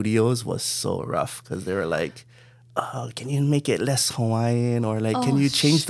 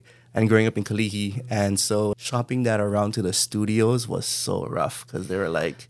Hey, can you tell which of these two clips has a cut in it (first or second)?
second